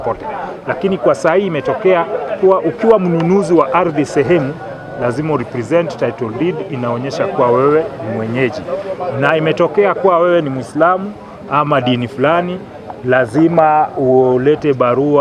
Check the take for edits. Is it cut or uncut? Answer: uncut